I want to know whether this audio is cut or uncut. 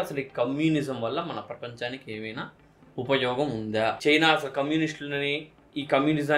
cut